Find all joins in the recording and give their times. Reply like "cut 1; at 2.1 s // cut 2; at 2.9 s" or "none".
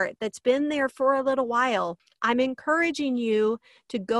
cut 1; at 2.0 s